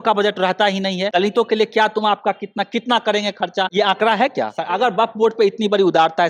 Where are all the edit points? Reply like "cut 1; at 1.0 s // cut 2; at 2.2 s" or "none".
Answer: cut 1; at 1.0 s // cut 2; at 3.7 s // cut 3; at 4.6 s

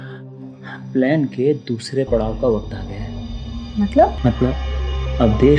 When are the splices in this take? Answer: cut 1; at 4.2 s

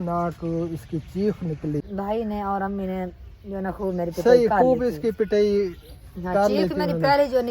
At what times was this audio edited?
cut 1; at 1.9 s

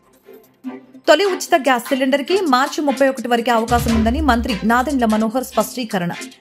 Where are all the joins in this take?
none

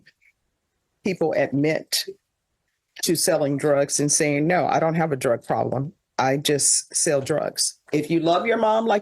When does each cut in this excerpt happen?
cut 1; at 7.8 s

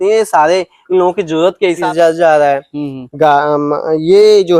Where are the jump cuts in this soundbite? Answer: cut 1; at 1.8 s

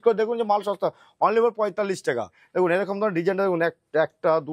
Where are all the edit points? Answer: cut 1; at 2.4 s

